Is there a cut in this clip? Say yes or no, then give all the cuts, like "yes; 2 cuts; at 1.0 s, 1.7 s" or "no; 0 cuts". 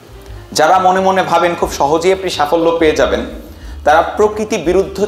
no; 0 cuts